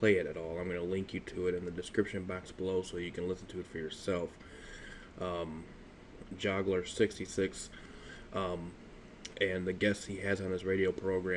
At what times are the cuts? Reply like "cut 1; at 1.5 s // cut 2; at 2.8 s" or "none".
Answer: cut 1; at 2.3 s